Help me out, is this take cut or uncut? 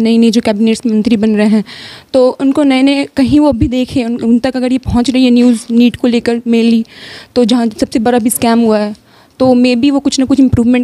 uncut